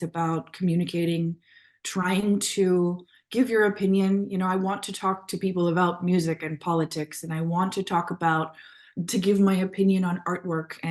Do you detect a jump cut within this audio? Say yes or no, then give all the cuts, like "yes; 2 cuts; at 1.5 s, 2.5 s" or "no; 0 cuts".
no; 0 cuts